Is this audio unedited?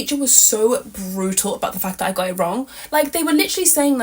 yes; 0 cuts

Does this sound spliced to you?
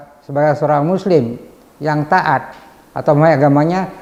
no; 0 cuts

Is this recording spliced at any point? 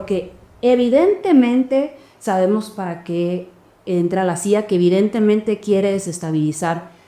no; 0 cuts

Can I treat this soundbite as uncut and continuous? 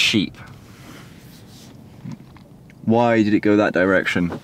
yes; 0 cuts

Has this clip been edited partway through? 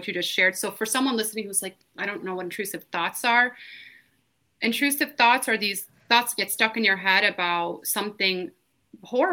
no; 0 cuts

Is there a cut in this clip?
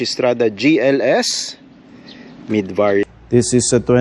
yes; 1 cut; at 3.0 s

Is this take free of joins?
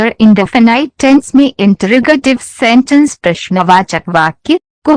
no; 2 cuts; at 2.2 s, 4.0 s

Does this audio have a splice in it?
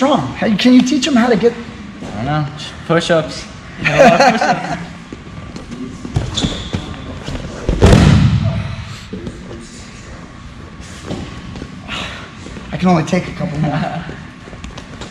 yes; 1 cut; at 4.6 s

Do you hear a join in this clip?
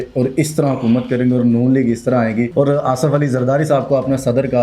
yes; 1 cut; at 2.5 s

